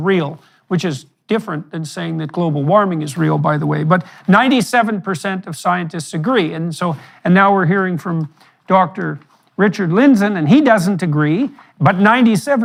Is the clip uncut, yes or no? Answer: yes